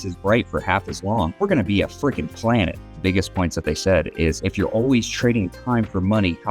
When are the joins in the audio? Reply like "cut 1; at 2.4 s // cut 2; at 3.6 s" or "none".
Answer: cut 1; at 1.3 s // cut 2; at 3.0 s // cut 3; at 4.4 s